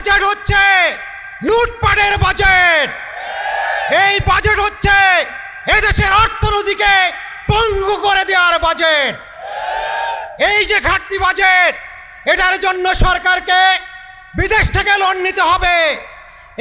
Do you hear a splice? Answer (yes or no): no